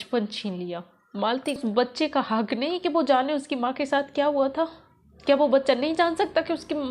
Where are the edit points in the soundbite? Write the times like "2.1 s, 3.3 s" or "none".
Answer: 1.6 s